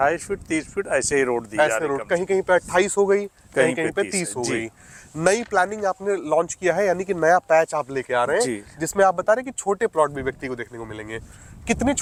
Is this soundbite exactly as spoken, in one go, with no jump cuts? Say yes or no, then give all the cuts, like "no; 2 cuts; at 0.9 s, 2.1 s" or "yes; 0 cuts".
yes; 0 cuts